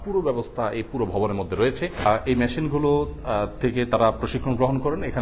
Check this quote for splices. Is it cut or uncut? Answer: cut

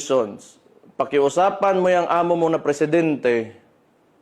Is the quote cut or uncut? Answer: uncut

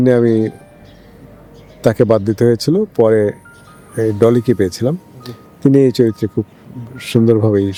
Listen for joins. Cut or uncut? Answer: uncut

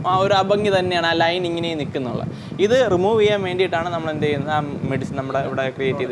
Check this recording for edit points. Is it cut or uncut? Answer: uncut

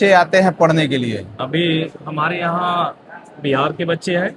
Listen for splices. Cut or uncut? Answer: uncut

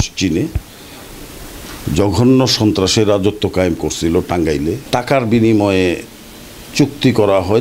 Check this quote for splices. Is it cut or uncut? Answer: cut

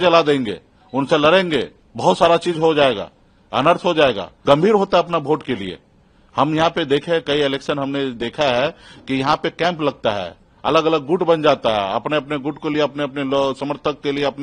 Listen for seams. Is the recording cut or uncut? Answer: cut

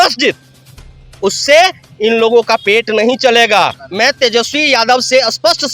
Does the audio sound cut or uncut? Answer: cut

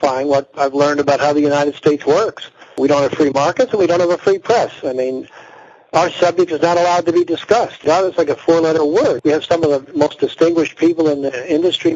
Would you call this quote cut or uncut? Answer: cut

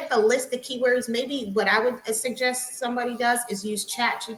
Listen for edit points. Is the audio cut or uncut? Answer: uncut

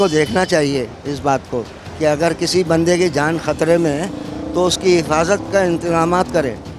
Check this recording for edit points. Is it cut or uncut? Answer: uncut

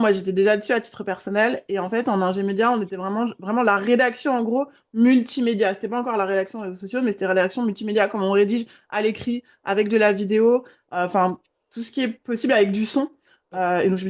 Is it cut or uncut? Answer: uncut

